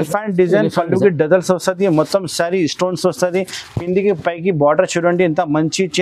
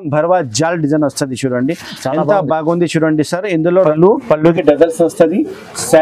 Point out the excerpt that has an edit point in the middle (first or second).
second